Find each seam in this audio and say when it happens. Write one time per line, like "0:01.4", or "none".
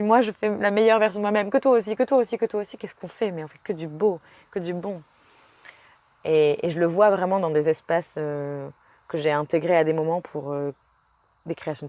none